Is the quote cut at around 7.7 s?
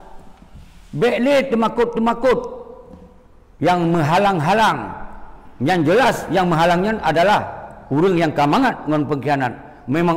no; 0 cuts

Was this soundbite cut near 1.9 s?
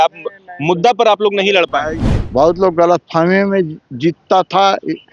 yes; 1 cut; at 1.9 s

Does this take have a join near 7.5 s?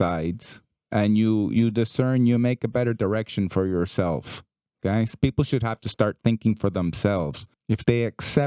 yes; 1 cut; at 7.5 s

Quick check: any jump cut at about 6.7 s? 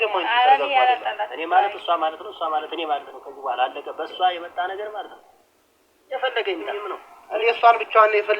yes; 1 cut; at 6.7 s

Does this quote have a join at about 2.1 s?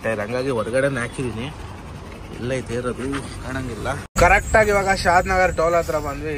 no; 1 cut; at 4.1 s

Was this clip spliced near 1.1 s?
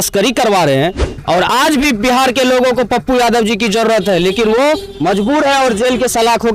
yes; 1 cut; at 1.1 s

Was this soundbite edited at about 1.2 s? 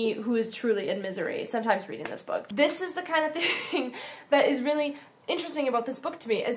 no; 1 cut; at 2.5 s

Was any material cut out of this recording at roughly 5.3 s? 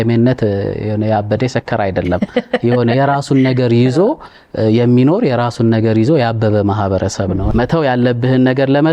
no; 1 cut; at 7.4 s

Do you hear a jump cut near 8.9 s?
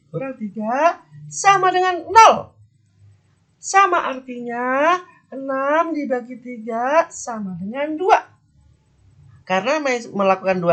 no; 0 cuts

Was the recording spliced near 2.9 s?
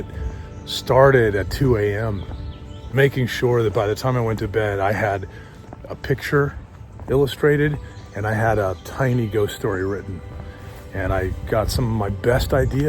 yes; 1 cut; at 2.9 s

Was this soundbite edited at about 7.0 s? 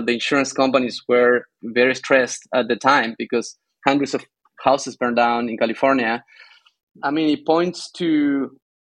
yes; 1 cut; at 7.0 s

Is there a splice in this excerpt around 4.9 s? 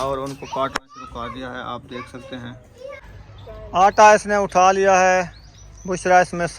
no; 1 cut; at 3.0 s

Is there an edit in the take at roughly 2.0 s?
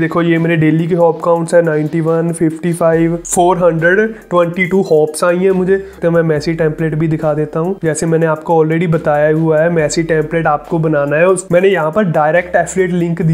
no; 3 cuts; at 3.2 s, 6.0 s, 11.4 s

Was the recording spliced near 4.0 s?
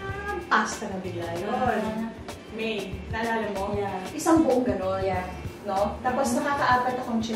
yes; 1 cut; at 4.0 s

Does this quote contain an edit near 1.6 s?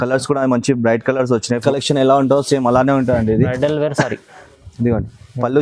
yes; 1 cut; at 1.6 s

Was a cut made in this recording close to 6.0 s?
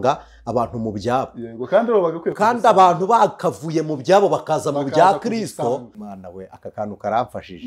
yes; 1 cut; at 6.0 s

